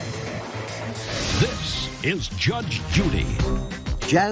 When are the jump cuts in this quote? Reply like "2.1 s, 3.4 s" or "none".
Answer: 2.1 s